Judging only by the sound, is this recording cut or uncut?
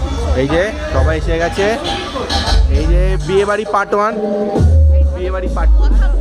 uncut